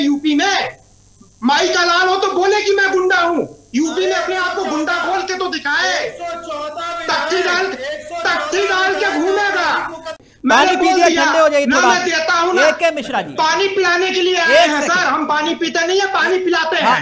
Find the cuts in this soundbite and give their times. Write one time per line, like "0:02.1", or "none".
0:10.2